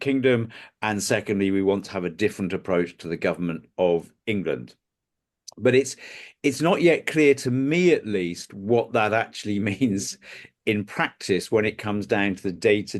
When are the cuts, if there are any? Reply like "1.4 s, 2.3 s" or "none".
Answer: none